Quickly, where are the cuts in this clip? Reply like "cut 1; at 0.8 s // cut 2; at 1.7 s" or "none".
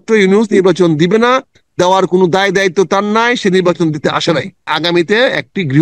cut 1; at 4.7 s

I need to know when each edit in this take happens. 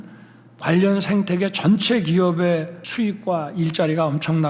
cut 1; at 2.8 s

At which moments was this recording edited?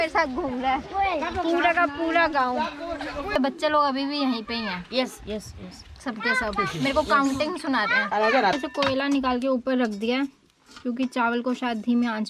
cut 1; at 3.3 s // cut 2; at 8.6 s

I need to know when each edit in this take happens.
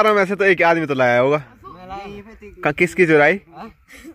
none

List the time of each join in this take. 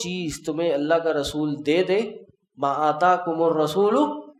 none

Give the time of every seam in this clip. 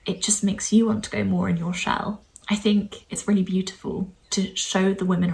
cut 1; at 2.3 s // cut 2; at 3.0 s // cut 3; at 4.2 s

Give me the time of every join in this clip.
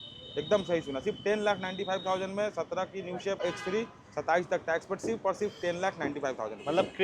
cut 1; at 3.4 s

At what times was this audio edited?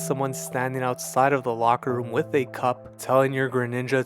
cut 1; at 2.9 s

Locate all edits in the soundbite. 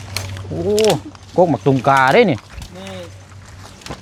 none

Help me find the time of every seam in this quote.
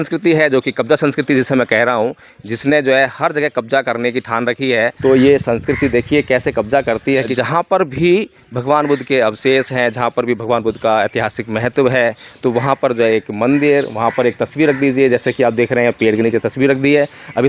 cut 1; at 4.9 s // cut 2; at 7.3 s

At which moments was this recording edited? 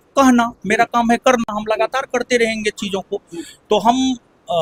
none

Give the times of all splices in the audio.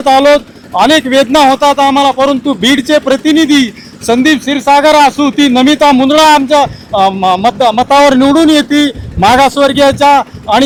none

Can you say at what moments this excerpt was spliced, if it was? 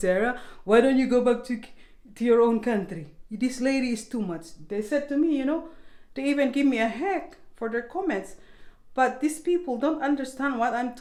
none

